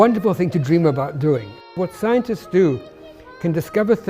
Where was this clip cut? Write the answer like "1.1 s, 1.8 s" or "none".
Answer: 1.7 s